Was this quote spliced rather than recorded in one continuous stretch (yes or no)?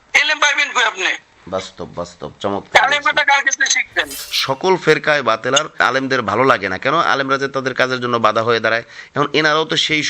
yes